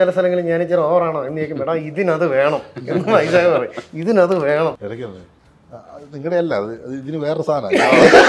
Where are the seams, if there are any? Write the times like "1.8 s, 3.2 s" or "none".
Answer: 4.8 s